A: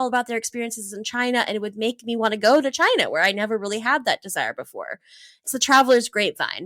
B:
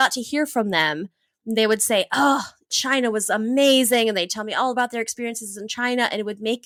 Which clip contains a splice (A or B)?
A